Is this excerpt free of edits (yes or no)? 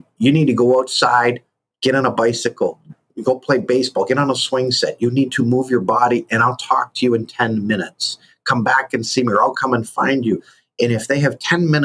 no